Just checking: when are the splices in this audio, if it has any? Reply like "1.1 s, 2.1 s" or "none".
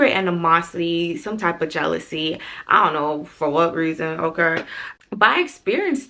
none